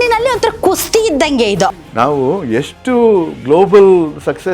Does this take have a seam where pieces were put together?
yes; 1 cut; at 1.8 s

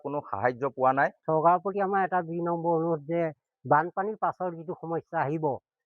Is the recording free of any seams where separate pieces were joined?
no; 1 cut; at 1.2 s

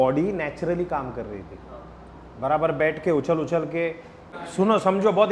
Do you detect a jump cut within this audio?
yes; 1 cut; at 4.4 s

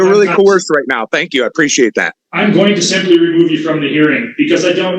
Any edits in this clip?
yes; 1 cut; at 2.1 s

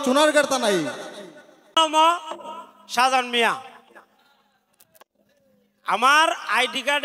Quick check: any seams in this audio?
yes; 1 cut; at 1.7 s

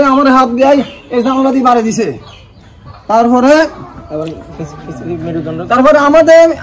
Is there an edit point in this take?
no; 0 cuts

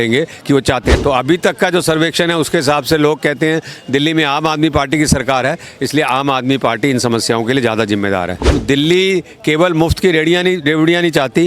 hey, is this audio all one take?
no; 2 cuts; at 0.9 s, 8.5 s

